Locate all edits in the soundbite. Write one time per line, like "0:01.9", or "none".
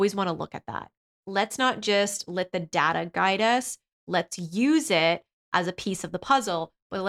0:01.1